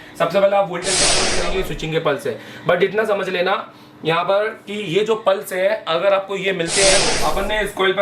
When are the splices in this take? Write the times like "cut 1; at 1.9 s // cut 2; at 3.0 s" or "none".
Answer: cut 1; at 1.2 s // cut 2; at 7.1 s